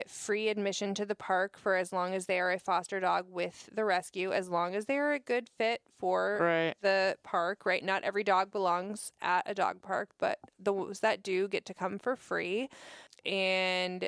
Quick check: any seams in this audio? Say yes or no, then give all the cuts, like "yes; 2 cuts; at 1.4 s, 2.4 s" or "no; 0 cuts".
yes; 1 cut; at 13.1 s